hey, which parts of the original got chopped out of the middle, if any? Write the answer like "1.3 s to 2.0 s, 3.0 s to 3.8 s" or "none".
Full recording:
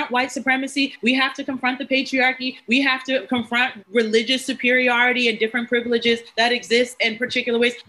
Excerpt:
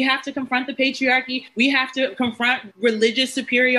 none

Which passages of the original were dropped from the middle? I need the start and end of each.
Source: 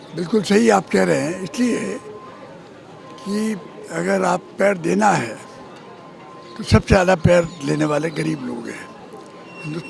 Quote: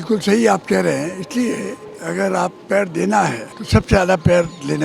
2.1 s to 3.8 s, 5.4 s to 6.5 s

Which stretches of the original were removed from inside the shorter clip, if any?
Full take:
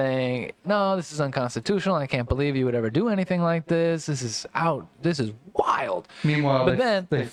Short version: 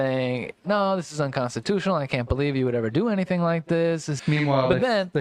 4.1 s to 6.1 s

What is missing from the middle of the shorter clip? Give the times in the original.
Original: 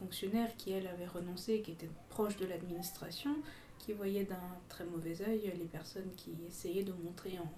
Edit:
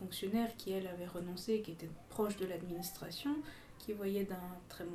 none

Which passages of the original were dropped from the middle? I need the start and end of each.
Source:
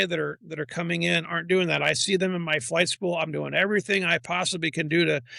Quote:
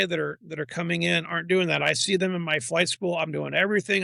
none

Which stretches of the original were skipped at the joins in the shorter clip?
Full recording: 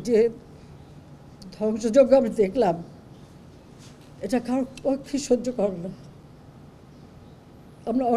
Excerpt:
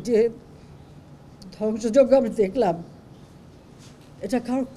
none

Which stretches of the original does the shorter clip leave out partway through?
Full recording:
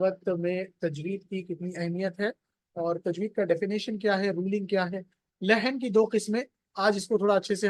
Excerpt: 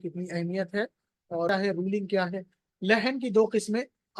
2.9 s to 4.1 s

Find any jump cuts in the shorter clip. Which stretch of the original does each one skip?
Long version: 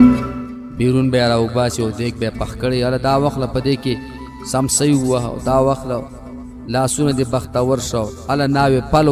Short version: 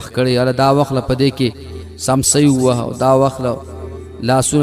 none

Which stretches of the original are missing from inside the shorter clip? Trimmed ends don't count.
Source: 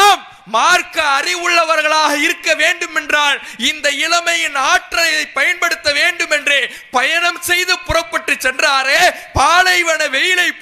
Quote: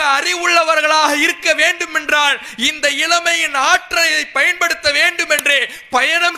none

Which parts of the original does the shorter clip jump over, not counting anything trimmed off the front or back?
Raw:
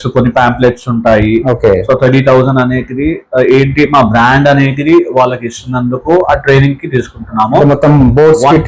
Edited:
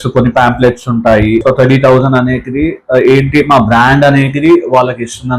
1.4 s to 1.8 s

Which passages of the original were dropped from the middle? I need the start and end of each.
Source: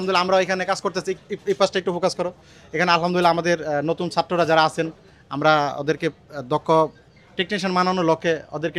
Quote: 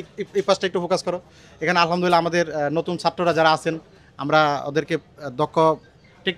none

